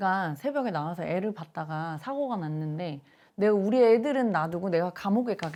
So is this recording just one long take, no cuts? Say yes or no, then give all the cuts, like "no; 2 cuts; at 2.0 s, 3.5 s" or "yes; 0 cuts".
yes; 0 cuts